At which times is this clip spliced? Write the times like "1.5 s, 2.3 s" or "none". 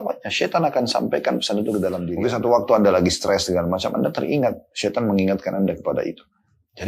2.1 s